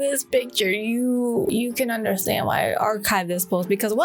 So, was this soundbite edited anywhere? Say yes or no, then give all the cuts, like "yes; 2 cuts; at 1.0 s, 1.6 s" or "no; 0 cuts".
no; 0 cuts